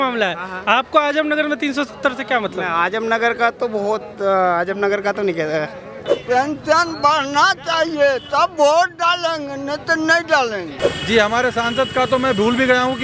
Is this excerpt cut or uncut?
cut